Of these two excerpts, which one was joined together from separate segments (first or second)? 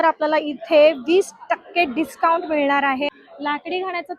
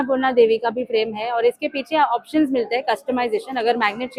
first